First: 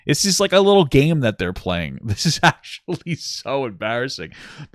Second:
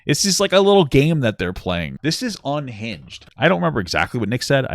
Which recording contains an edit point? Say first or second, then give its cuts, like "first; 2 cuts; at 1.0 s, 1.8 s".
second; 2 cuts; at 1.9 s, 3.3 s